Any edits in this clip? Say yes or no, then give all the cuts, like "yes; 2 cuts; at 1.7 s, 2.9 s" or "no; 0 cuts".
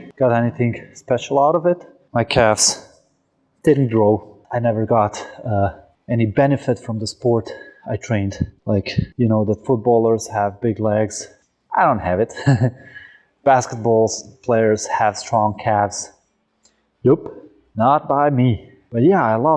no; 0 cuts